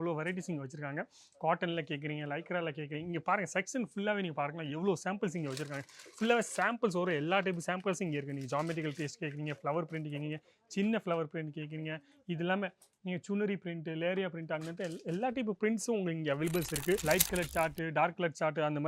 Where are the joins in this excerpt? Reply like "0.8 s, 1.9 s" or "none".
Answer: 17.0 s

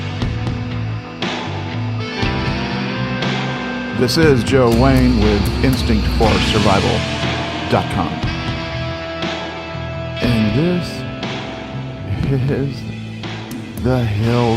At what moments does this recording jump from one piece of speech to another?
1.0 s

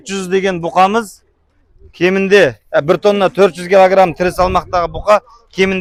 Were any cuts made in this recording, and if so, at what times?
none

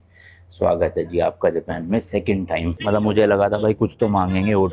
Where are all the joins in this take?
2.8 s

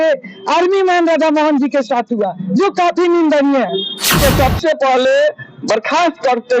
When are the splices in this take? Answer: 4.2 s

